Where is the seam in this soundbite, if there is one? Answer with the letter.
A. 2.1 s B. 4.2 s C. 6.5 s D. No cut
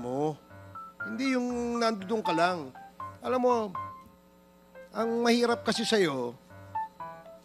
C